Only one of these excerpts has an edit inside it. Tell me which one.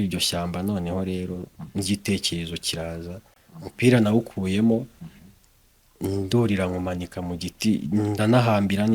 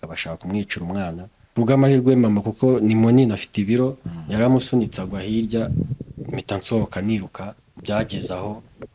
second; 2 cuts; at 1.5 s, 7.7 s

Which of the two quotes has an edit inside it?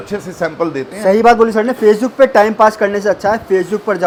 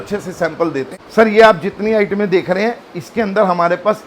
second; 1 cut; at 0.9 s

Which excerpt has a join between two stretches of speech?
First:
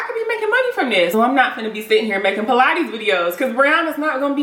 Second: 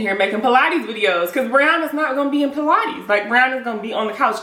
first; 1 cut; at 1.1 s

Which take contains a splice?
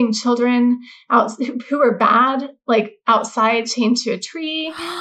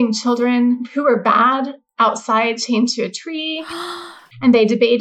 second; 3 cuts; at 0.9 s, 1.8 s, 3.9 s

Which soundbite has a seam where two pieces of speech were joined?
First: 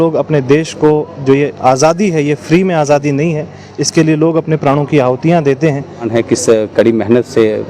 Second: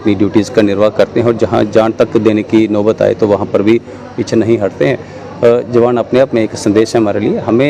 first; 1 cut; at 6.1 s

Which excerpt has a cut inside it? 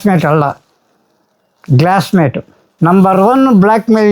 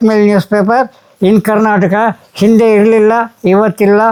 first; 1 cut; at 2.6 s

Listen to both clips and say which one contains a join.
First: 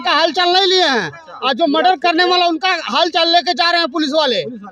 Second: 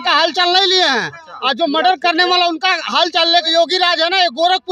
second; 1 cut; at 3.4 s

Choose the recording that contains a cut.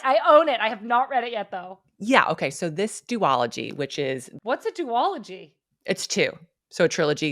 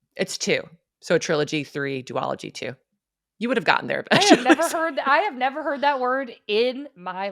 first; 1 cut; at 4.3 s

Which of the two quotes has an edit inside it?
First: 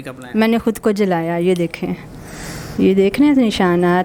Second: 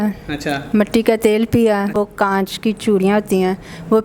second; 1 cut; at 1.9 s

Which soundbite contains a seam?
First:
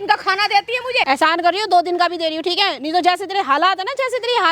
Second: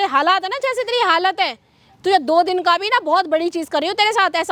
first; 1 cut; at 1.0 s

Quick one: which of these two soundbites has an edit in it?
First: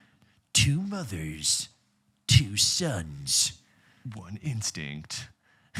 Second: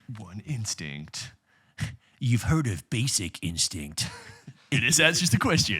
second; 1 cut; at 4.7 s

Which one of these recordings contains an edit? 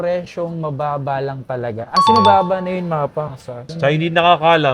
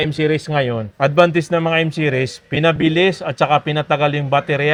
first; 1 cut; at 3.7 s

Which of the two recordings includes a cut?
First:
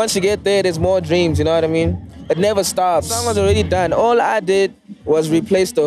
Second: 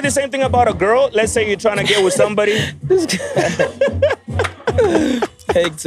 first; 2 cuts; at 2.1 s, 3.2 s

